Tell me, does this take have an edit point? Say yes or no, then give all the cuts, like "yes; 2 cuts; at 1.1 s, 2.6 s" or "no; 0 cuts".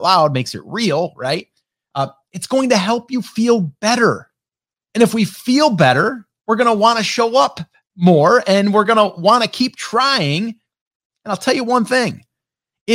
no; 0 cuts